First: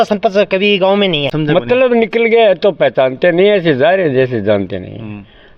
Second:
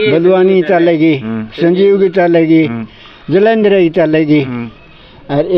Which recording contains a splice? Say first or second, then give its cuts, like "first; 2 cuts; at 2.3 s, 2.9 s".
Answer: first; 1 cut; at 1.3 s